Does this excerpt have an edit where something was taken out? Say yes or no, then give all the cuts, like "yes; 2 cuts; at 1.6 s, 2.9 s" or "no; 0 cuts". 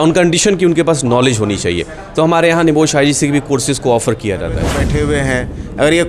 yes; 1 cut; at 4.8 s